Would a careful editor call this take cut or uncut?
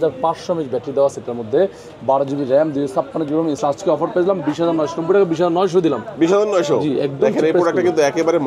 cut